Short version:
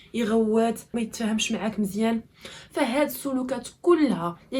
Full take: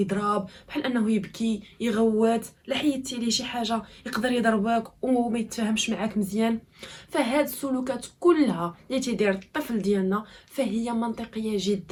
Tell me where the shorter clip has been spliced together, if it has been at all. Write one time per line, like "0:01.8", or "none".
0:00.9